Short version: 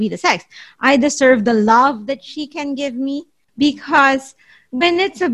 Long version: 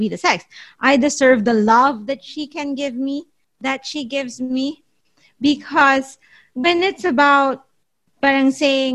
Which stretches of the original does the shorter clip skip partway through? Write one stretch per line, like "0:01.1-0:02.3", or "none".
0:03.4-0:05.2